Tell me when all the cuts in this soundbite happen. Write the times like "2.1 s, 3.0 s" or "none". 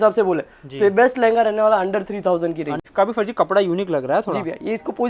2.8 s